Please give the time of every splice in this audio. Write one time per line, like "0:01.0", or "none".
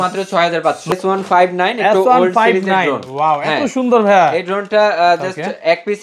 0:00.9